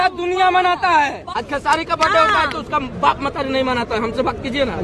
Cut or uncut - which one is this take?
cut